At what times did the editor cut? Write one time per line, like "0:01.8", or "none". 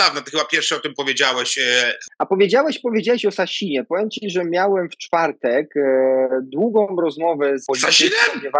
0:02.0
0:07.6